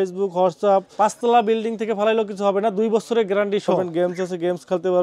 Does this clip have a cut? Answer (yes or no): yes